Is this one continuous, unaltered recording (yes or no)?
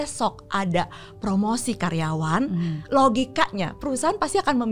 yes